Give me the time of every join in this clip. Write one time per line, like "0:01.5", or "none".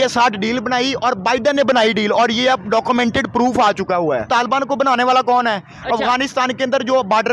0:04.3

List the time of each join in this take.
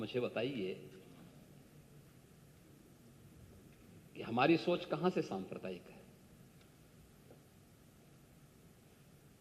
none

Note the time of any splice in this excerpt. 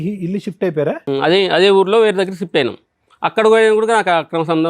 0:01.0

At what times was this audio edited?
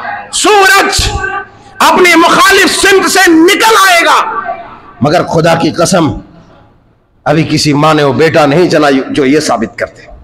none

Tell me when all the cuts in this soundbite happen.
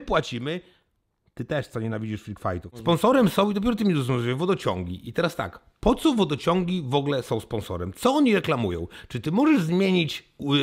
0:02.7

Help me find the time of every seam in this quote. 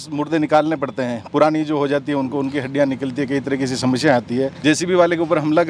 0:04.5

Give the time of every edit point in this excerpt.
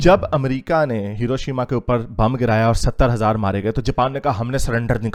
none

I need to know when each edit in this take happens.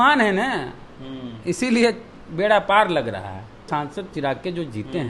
0:03.7

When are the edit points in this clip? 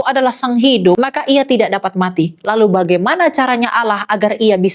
0:01.0

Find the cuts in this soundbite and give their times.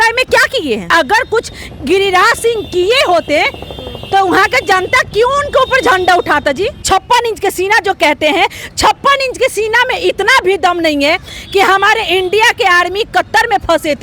0:00.9
0:06.8

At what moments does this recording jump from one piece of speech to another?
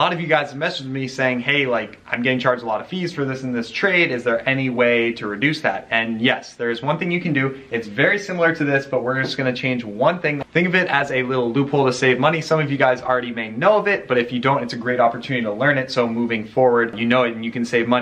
0:17.0

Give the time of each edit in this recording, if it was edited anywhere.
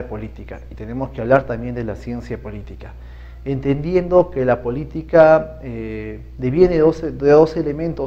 0:05.8

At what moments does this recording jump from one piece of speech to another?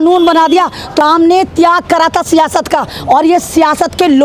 0:01.0

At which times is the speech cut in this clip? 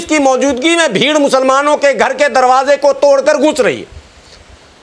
none

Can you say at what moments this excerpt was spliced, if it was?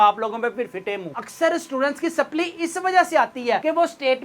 0:01.2

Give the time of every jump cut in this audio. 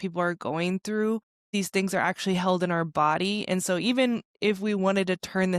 0:01.5

